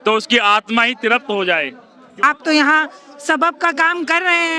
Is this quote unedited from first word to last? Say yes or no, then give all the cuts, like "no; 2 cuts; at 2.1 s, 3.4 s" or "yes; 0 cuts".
no; 1 cut; at 2.2 s